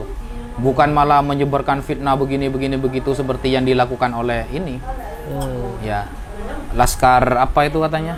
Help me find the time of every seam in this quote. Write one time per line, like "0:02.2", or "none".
none